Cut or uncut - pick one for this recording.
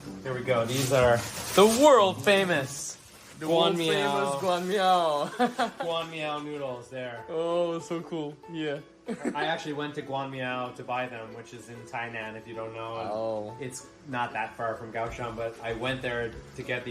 uncut